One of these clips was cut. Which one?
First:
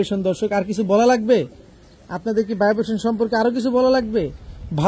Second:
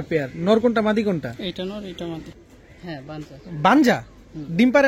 second; 1 cut; at 2.4 s

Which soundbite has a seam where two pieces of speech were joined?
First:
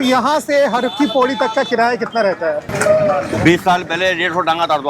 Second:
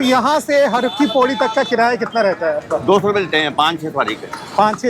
first; 1 cut; at 2.7 s

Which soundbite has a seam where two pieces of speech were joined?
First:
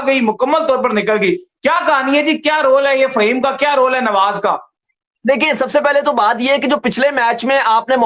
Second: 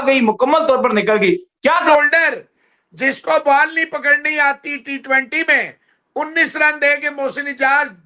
second; 1 cut; at 1.9 s

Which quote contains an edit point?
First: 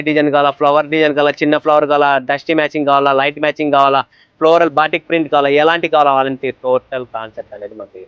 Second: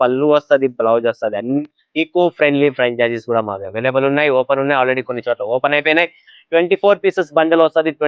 second; 2 cuts; at 1.6 s, 6.3 s

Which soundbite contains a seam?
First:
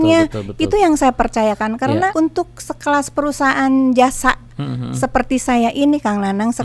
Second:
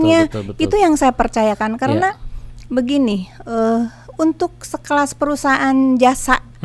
first; 1 cut; at 2.1 s

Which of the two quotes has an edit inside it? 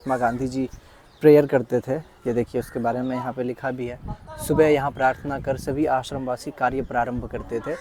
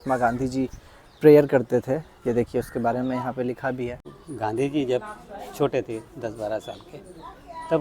second; 1 cut; at 4.2 s

